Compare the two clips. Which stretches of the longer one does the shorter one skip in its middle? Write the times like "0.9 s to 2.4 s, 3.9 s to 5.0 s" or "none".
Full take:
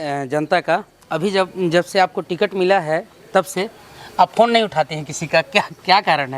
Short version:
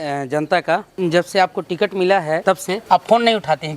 0.9 s to 1.5 s, 3.2 s to 3.8 s